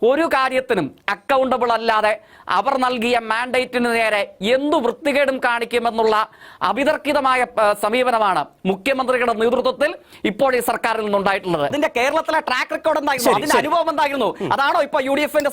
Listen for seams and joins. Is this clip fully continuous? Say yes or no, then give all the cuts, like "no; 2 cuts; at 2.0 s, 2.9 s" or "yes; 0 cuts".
no; 1 cut; at 11.7 s